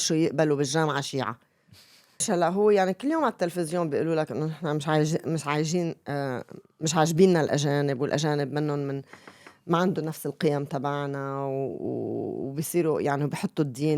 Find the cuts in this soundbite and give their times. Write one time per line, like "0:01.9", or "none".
0:02.2